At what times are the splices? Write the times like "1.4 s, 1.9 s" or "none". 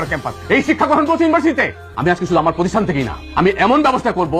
1.8 s